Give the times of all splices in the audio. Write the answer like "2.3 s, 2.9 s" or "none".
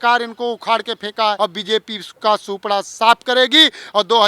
1.4 s